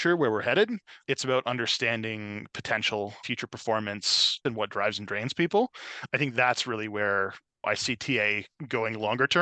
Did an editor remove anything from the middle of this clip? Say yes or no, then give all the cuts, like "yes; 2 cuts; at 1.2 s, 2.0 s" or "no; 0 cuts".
yes; 2 cuts; at 3.2 s, 4.4 s